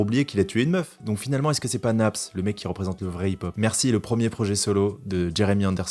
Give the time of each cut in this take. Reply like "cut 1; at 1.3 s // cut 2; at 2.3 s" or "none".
cut 1; at 1.0 s // cut 2; at 3.5 s